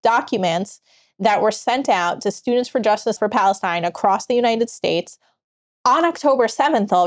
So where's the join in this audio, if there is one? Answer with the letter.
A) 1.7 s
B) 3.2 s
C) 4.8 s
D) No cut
B